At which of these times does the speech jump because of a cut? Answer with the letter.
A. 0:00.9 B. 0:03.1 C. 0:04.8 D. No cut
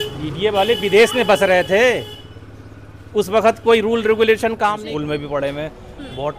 C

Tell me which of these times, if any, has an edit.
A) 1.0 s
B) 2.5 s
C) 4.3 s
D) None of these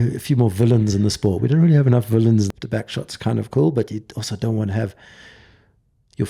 B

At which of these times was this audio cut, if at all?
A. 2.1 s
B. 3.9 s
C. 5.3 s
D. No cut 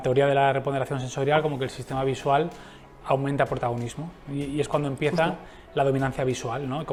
D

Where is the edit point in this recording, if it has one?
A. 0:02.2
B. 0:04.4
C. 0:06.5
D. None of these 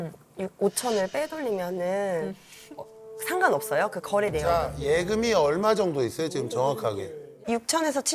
B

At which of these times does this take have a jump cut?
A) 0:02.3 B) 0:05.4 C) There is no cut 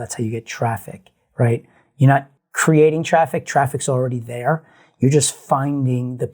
A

